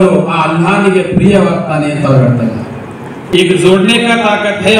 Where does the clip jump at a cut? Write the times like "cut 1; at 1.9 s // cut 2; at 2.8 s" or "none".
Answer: cut 1; at 3.3 s